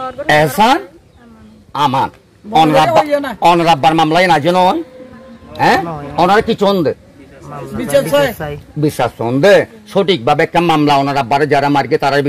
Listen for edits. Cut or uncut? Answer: uncut